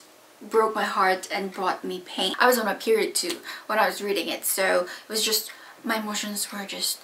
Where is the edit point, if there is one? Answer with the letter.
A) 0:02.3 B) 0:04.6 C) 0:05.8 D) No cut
A